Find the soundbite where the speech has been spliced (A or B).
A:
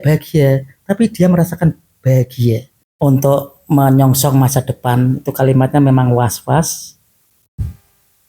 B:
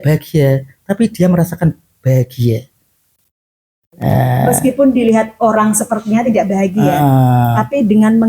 A